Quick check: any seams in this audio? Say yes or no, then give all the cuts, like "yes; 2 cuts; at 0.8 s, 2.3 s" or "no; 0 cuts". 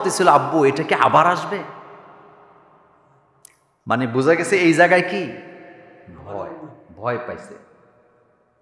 no; 0 cuts